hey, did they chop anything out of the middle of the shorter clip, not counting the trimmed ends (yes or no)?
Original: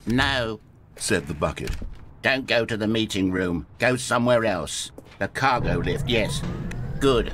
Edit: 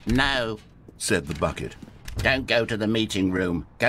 no